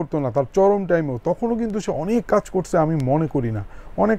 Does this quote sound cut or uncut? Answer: uncut